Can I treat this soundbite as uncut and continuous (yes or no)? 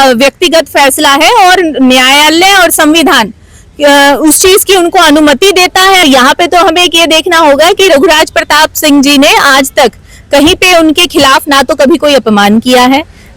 no